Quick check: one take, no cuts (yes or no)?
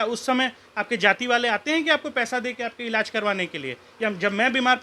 yes